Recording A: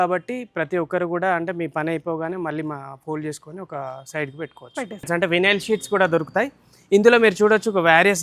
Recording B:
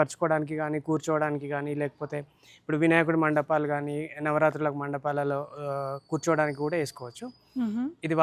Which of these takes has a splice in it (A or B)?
A